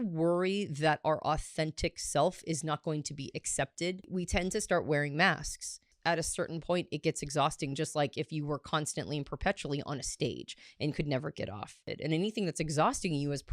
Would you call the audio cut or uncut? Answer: cut